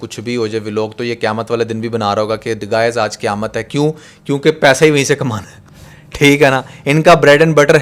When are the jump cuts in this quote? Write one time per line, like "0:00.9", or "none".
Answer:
none

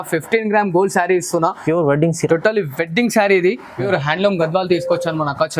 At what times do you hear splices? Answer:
0:03.9

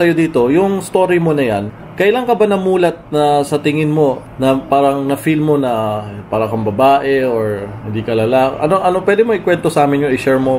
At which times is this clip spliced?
none

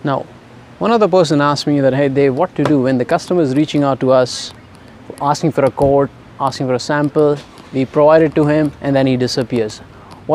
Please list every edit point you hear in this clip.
none

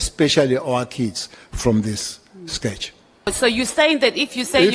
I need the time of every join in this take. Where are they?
0:03.3

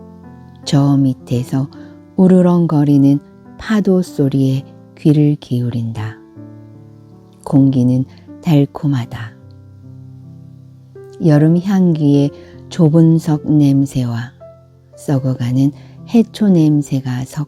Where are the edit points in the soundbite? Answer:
none

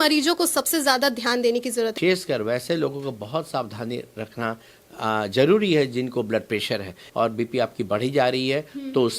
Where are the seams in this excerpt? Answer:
0:01.9
0:07.0

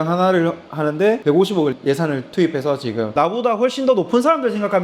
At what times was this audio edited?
0:01.2
0:02.9

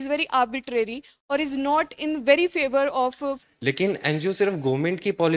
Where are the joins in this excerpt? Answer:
0:03.4

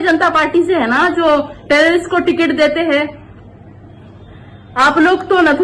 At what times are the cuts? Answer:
none

